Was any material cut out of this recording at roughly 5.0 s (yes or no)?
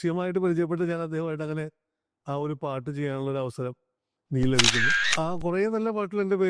yes